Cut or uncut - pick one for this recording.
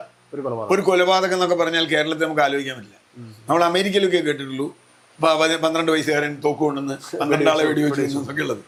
uncut